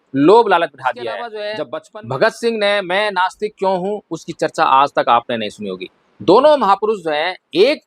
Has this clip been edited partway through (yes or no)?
yes